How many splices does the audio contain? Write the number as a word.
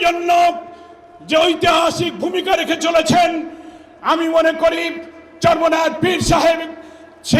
zero